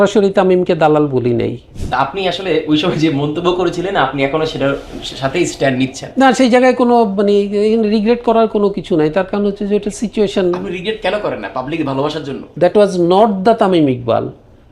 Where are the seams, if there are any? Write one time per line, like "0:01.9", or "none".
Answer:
0:01.7
0:12.5